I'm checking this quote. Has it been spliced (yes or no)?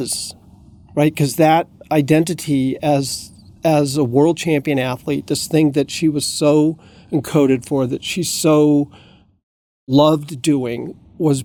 no